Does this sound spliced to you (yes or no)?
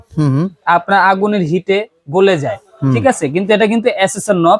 no